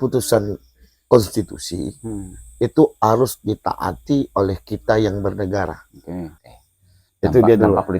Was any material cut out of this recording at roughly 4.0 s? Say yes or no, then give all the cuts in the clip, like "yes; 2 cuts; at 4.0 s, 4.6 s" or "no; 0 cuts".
no; 1 cut; at 6.4 s